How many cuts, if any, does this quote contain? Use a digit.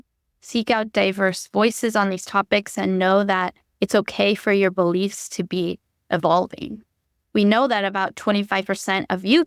1